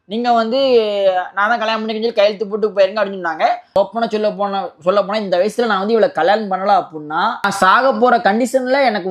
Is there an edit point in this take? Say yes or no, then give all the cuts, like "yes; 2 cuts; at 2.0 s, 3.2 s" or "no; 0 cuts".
yes; 2 cuts; at 3.8 s, 7.5 s